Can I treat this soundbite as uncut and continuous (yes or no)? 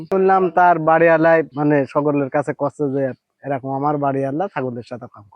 no